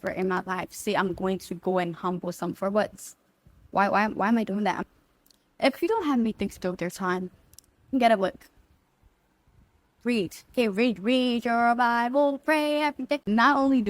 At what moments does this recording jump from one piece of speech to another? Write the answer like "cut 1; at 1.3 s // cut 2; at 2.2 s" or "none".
none

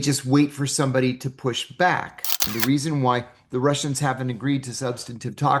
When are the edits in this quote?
cut 1; at 2.5 s

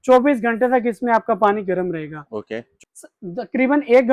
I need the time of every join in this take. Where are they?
cut 1; at 2.7 s

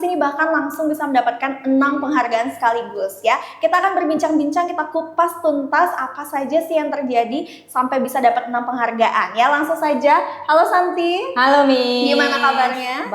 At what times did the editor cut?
none

